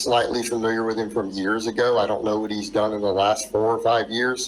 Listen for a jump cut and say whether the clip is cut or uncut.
uncut